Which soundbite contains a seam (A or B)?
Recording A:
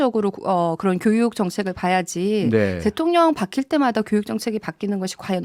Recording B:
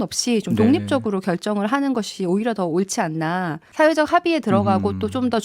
B